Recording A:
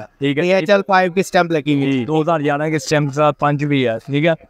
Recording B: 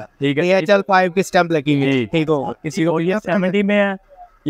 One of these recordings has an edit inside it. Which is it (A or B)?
A